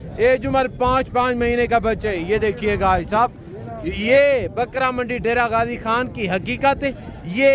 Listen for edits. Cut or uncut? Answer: uncut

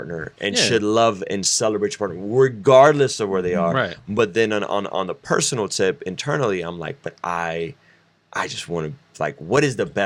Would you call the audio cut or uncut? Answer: uncut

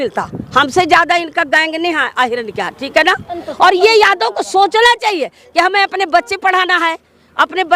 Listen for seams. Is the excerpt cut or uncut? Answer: cut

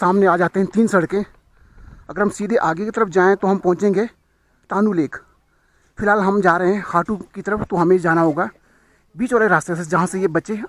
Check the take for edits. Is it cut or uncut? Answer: uncut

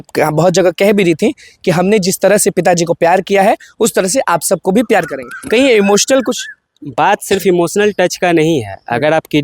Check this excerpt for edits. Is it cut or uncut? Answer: uncut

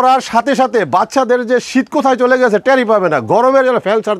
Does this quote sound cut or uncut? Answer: uncut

